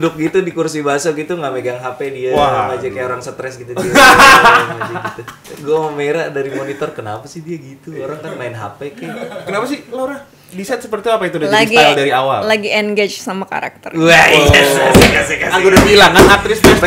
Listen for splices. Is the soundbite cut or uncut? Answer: uncut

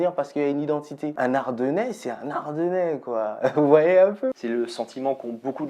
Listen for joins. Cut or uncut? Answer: cut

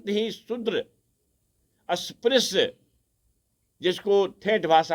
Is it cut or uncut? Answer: uncut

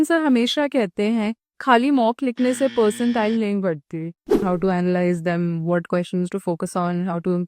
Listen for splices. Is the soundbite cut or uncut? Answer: cut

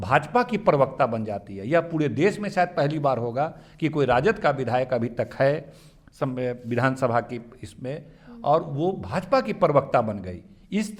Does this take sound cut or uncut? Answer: uncut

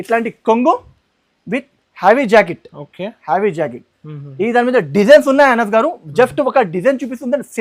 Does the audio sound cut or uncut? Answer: uncut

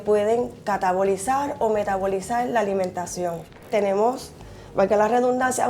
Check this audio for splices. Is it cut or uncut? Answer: cut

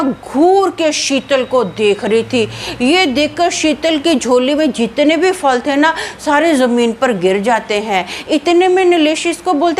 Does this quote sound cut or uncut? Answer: uncut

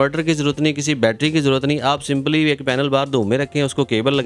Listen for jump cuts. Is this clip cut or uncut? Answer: uncut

